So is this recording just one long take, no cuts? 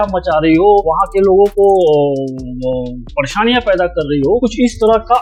yes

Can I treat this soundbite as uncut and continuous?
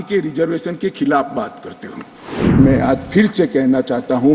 no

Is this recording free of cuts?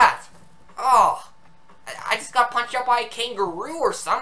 yes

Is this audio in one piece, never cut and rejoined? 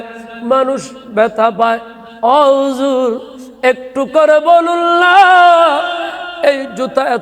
yes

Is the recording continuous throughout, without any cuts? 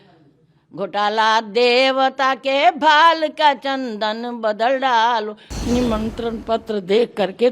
no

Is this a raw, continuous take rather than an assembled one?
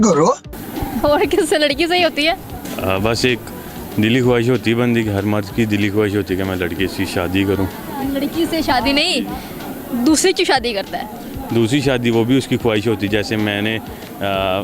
yes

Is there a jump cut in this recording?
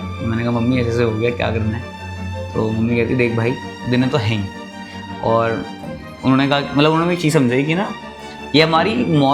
no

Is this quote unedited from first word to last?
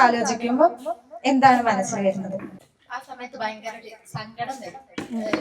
no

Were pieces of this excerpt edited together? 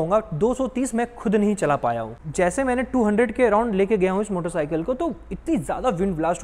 no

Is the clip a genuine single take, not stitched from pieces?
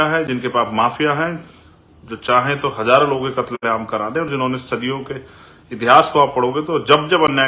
yes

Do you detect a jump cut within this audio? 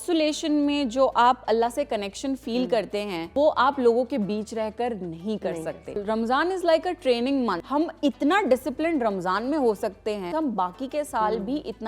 yes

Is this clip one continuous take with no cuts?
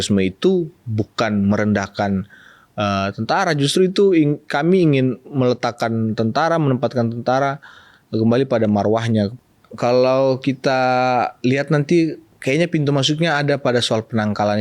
no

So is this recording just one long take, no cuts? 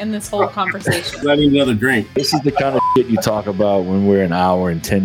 no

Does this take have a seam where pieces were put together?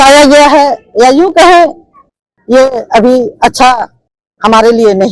no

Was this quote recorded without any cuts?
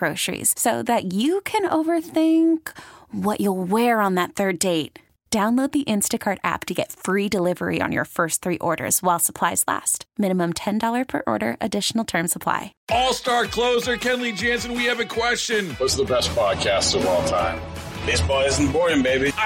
no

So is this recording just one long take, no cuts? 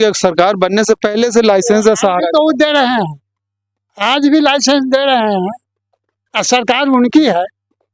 yes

